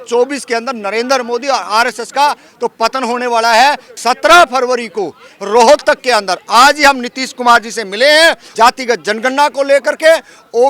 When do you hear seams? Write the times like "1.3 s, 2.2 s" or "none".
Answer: 3.9 s, 8.4 s